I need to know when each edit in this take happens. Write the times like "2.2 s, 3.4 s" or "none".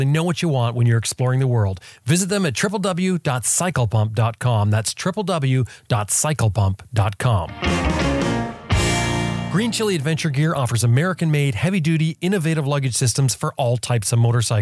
7.5 s, 9.5 s

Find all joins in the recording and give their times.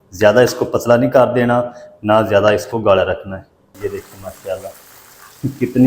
3.7 s

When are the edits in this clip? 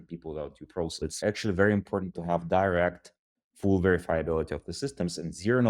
1.2 s

